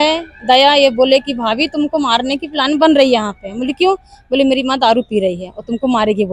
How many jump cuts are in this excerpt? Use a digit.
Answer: 0